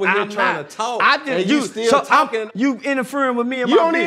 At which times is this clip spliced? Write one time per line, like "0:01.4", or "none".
0:02.4